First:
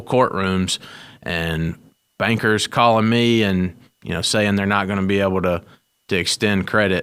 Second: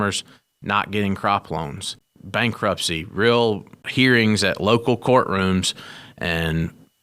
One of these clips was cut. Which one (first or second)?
second